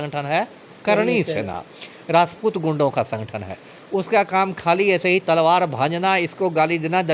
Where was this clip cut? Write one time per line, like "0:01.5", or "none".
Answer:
none